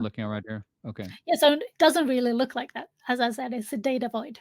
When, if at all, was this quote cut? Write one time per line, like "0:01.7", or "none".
none